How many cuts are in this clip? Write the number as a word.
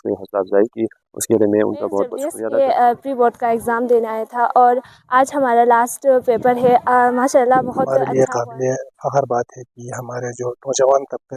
two